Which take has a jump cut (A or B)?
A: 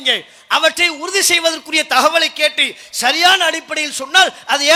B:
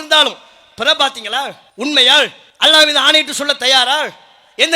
B